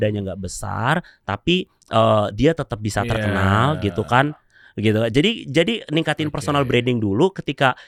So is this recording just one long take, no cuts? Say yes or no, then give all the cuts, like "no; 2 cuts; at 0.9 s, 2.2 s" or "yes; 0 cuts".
yes; 0 cuts